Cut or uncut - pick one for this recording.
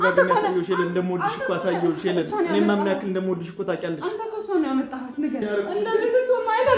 cut